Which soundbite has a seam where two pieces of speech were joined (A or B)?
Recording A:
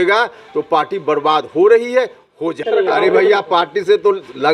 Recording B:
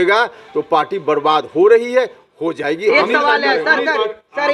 A